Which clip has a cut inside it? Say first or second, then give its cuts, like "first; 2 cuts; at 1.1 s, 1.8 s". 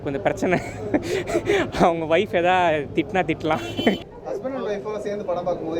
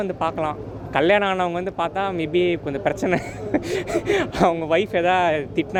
first; 1 cut; at 4.1 s